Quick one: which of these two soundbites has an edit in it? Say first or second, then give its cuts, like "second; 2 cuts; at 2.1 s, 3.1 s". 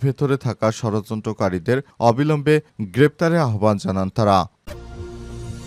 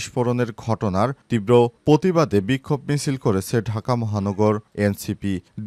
first; 1 cut; at 4.6 s